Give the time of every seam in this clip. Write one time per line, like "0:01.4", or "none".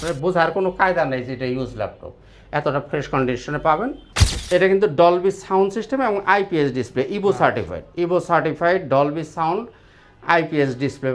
0:04.0